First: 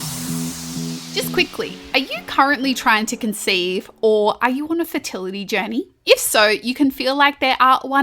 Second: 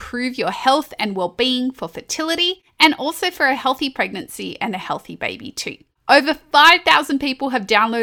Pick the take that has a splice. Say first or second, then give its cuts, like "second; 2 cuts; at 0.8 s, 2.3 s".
first; 1 cut; at 1.1 s